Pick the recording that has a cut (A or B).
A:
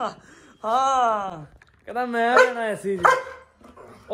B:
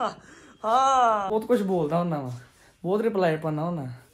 B